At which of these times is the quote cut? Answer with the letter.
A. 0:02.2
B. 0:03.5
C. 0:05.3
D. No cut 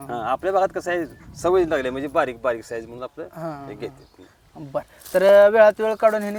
D